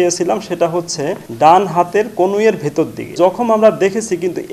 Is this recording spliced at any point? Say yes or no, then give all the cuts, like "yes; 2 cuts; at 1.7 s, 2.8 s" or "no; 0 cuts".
yes; 2 cuts; at 1.2 s, 3.1 s